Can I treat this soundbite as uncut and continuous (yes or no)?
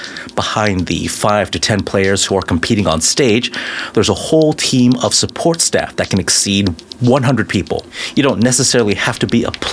no